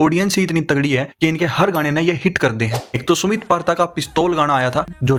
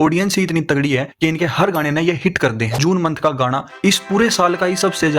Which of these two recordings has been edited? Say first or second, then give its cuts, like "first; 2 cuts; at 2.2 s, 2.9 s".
second; 1 cut; at 2.8 s